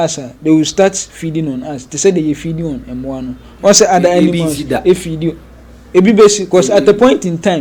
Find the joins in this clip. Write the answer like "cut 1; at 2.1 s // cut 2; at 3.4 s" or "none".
none

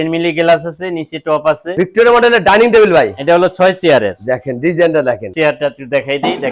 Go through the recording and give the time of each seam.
cut 1; at 1.8 s

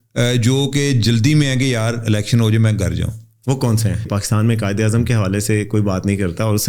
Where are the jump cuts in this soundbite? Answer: cut 1; at 4.1 s

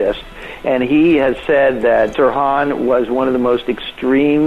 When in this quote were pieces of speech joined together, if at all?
cut 1; at 2.1 s

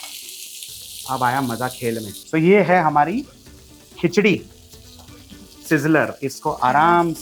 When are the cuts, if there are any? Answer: cut 1; at 2.2 s

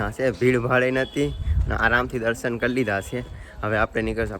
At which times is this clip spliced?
none

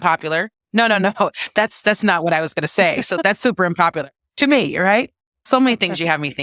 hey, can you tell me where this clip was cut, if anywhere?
cut 1; at 5.5 s

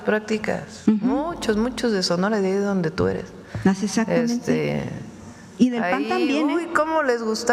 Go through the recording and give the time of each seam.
none

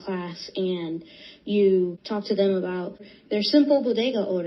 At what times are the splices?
cut 1; at 2.0 s

